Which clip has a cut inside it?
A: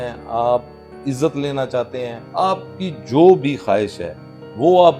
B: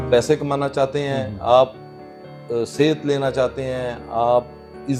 A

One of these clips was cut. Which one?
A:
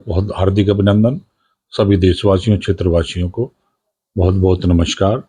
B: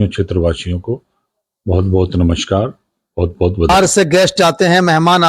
B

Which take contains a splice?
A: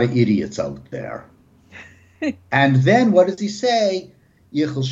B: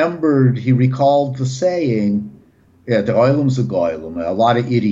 A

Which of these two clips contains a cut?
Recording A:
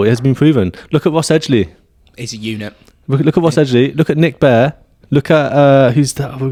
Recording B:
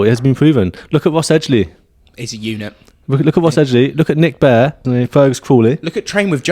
B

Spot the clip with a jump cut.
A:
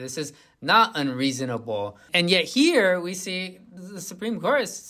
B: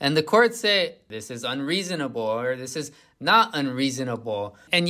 B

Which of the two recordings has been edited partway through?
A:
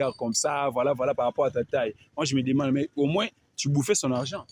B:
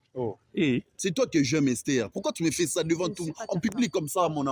B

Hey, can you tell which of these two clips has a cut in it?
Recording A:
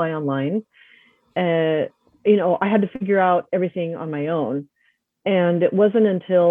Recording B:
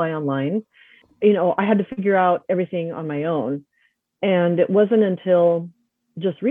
B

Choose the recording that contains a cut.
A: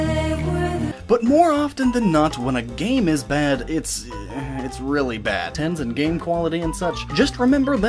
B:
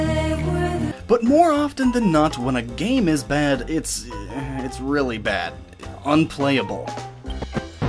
B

